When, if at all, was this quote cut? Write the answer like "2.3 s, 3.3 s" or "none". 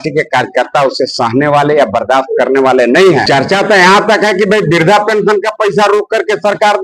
3.2 s